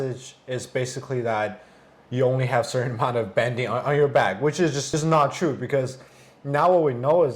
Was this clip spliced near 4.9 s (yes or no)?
yes